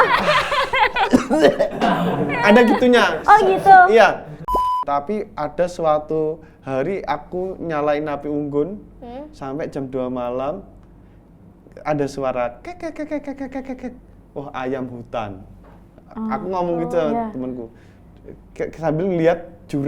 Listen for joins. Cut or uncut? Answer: cut